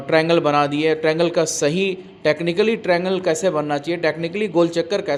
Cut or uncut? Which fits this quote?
uncut